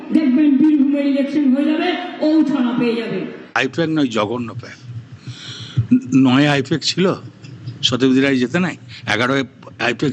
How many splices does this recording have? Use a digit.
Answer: 1